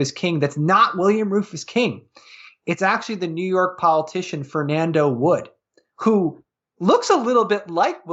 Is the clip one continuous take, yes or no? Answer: yes